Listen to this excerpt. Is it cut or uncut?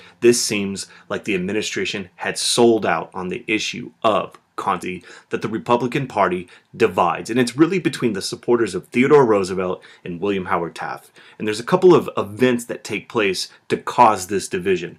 uncut